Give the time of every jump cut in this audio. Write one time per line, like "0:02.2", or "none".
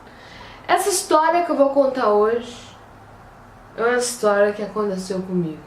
0:02.9